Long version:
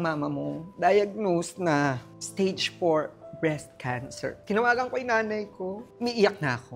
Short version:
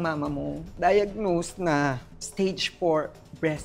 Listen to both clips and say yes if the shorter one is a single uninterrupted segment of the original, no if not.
yes